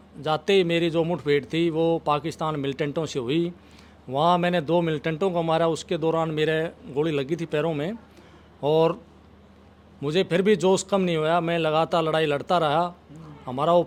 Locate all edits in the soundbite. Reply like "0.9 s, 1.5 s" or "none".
none